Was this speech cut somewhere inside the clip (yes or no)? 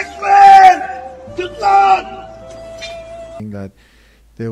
yes